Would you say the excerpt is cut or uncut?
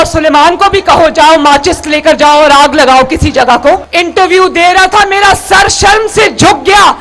cut